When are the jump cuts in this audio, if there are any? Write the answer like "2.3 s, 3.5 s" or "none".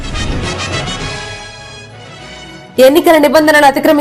none